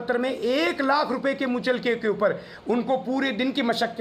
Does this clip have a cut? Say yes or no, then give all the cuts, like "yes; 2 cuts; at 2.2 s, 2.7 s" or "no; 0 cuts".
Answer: no; 0 cuts